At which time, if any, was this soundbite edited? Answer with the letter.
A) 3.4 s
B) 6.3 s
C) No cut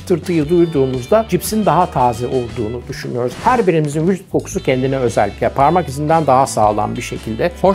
A